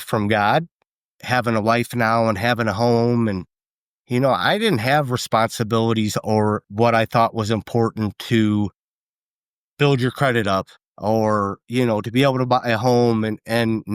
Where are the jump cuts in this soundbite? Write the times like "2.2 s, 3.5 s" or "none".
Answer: 1.1 s, 6.7 s